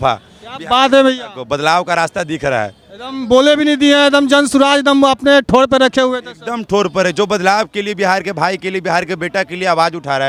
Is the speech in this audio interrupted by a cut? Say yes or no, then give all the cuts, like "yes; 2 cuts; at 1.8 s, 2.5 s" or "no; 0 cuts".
no; 0 cuts